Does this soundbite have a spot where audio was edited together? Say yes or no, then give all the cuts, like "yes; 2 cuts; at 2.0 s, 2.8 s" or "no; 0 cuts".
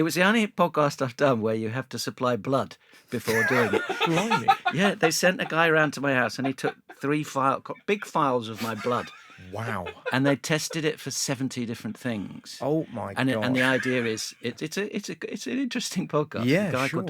no; 0 cuts